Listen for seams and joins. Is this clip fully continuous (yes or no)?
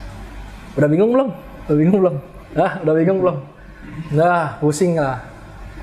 yes